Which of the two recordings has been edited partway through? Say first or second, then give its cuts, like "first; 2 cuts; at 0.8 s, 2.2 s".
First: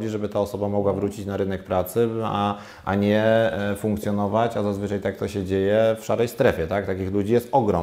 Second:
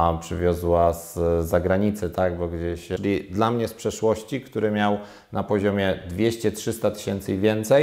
second; 1 cut; at 2.9 s